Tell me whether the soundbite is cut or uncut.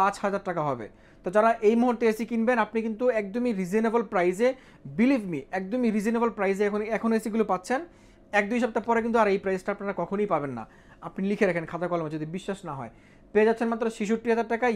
uncut